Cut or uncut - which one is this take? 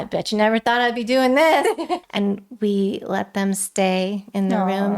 cut